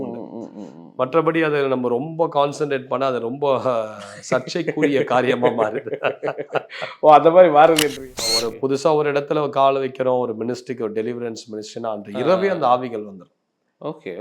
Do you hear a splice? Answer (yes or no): yes